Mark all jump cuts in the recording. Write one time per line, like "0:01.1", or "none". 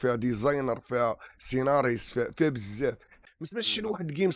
0:03.1